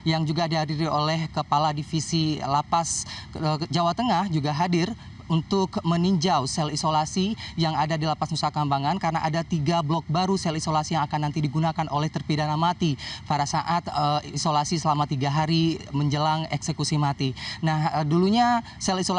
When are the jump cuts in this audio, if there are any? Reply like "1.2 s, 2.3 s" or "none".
7.7 s

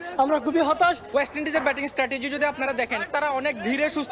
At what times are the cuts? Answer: 1.1 s

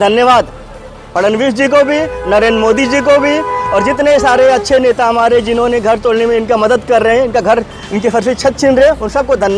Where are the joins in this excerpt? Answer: none

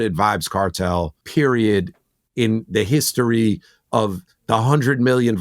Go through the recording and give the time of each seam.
1.2 s

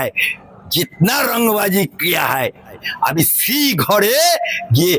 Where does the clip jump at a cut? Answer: 2.9 s

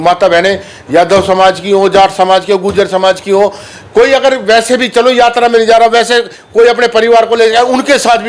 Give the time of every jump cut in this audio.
none

